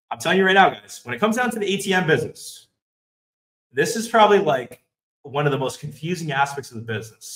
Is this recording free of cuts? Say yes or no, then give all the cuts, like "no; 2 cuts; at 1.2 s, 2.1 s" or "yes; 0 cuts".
yes; 0 cuts